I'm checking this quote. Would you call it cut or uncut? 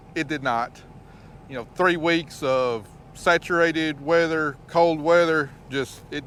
uncut